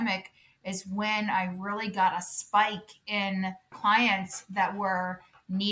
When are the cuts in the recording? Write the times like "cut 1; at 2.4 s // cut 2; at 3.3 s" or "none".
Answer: cut 1; at 3.6 s